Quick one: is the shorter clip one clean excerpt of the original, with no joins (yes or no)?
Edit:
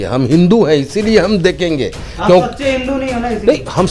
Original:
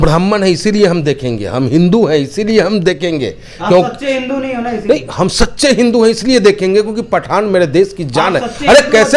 yes